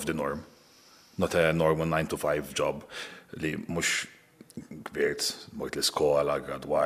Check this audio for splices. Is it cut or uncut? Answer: uncut